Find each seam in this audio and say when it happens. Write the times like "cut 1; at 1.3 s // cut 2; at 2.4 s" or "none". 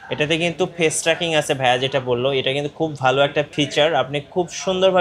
cut 1; at 3.5 s